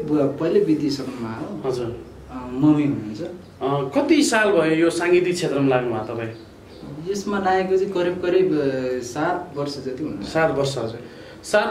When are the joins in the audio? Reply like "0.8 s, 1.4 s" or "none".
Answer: none